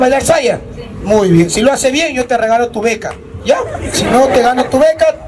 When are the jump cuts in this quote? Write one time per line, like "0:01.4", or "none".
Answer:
none